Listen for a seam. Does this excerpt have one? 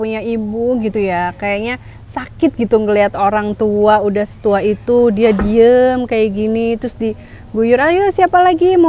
no; 0 cuts

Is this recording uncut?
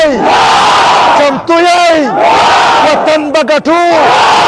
yes; 0 cuts

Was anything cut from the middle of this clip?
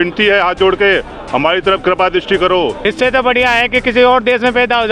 yes; 1 cut; at 2.8 s

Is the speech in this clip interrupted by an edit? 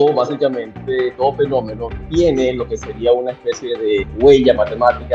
yes; 1 cut; at 2.3 s

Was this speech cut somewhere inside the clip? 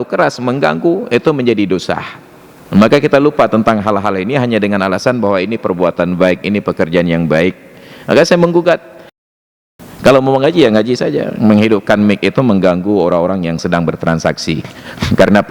yes; 1 cut; at 9.3 s

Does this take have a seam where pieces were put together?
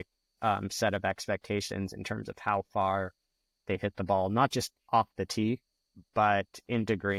no; 0 cuts

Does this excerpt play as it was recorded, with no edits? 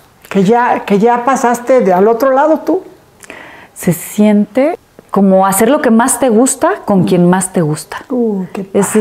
no; 1 cut; at 4.9 s

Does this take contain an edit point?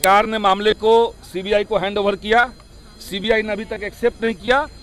no; 0 cuts

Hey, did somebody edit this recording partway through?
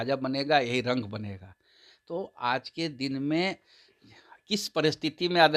no; 0 cuts

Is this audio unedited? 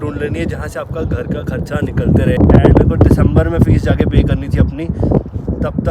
no; 1 cut; at 2.4 s

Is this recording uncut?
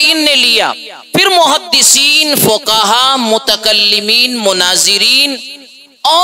yes; 0 cuts

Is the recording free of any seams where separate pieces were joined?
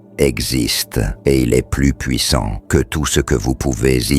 no; 2 cuts; at 1.1 s, 2.6 s

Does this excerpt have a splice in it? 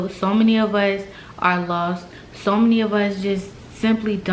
no; 0 cuts

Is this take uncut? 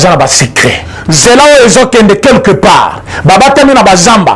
no; 1 cut; at 0.9 s

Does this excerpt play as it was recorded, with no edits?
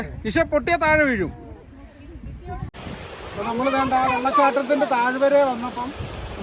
no; 1 cut; at 2.7 s

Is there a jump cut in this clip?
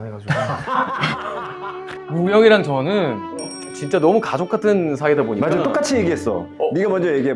no; 0 cuts

